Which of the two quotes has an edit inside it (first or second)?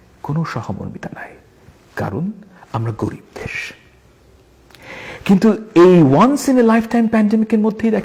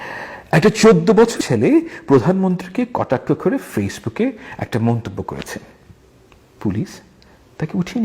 second